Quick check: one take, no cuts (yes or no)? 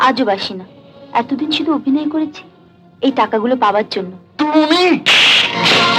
yes